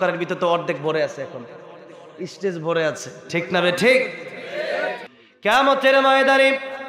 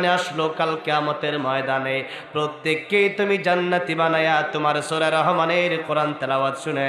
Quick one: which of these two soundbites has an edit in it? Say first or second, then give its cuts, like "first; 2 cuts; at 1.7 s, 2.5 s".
first; 1 cut; at 5.0 s